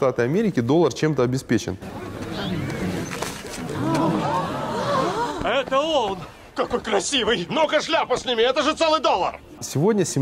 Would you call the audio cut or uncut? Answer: uncut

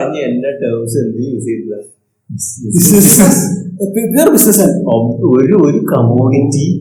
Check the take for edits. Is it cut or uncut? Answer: uncut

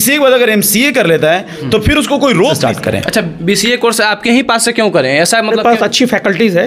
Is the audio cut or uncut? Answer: cut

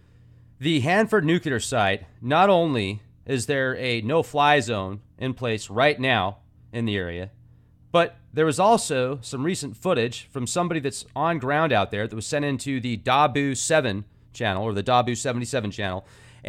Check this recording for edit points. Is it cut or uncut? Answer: uncut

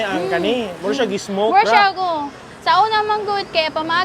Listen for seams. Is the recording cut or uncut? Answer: uncut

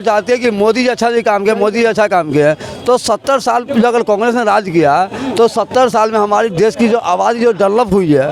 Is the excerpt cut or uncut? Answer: uncut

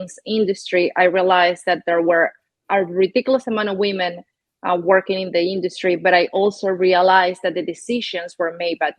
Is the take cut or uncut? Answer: uncut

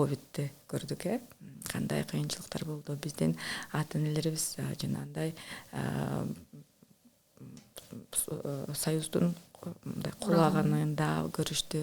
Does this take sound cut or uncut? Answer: uncut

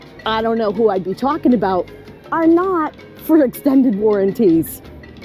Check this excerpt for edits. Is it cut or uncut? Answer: uncut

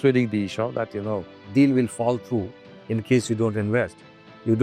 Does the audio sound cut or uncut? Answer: uncut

